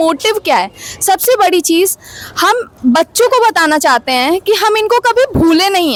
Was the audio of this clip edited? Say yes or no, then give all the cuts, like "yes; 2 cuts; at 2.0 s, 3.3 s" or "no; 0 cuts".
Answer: no; 0 cuts